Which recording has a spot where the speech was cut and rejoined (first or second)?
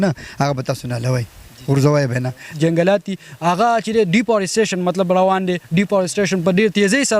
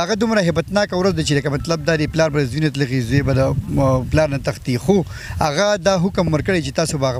first